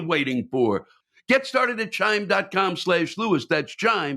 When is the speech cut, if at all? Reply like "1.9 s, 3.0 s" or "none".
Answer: 0.9 s